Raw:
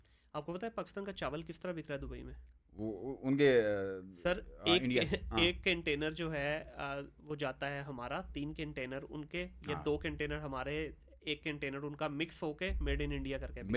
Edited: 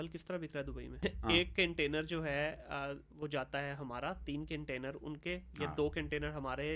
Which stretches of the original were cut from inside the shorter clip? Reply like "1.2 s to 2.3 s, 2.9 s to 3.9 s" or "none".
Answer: 2.3 s to 5.1 s